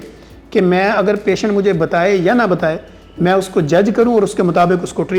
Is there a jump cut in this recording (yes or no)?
no